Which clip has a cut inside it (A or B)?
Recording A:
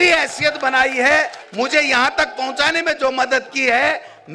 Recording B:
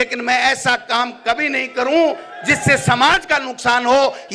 A